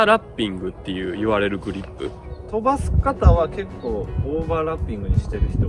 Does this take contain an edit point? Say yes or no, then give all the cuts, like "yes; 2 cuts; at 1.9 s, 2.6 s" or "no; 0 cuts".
yes; 1 cut; at 2.3 s